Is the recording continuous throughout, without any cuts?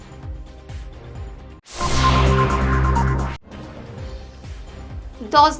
no; 1 cut; at 4.3 s

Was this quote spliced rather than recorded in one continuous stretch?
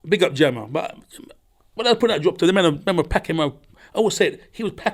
no; 0 cuts

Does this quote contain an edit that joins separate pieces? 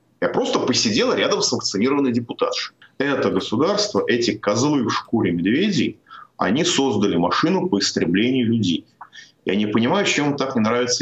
yes; 1 cut; at 2.8 s

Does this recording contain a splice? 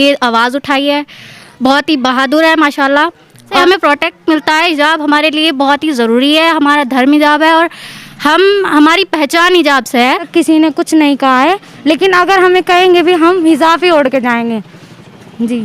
yes; 2 cuts; at 3.4 s, 10.2 s

